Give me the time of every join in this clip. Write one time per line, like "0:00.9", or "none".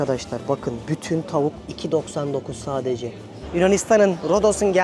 0:01.7
0:03.5

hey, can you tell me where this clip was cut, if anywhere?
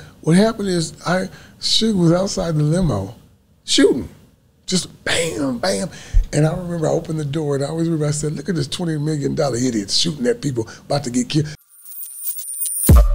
0:11.5

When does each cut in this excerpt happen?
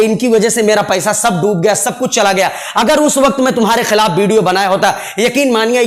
none

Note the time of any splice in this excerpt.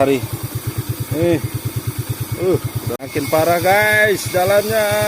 0:03.0

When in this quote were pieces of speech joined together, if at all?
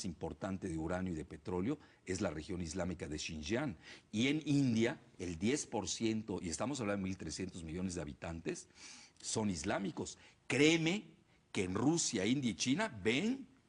0:10.1

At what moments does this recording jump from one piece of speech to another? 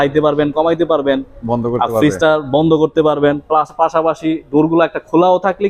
none

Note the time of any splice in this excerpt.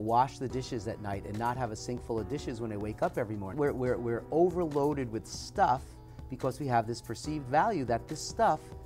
0:03.5

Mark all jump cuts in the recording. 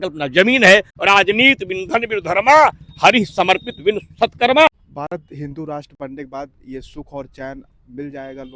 0:00.9
0:04.7

